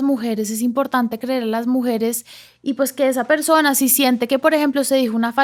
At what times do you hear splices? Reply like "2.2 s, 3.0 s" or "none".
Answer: none